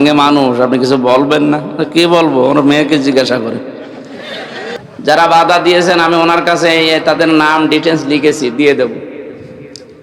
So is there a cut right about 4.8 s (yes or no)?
yes